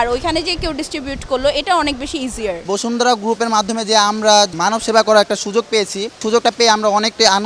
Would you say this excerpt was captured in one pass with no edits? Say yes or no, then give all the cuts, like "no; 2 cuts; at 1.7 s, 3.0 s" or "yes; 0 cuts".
no; 3 cuts; at 2.6 s, 4.5 s, 6.2 s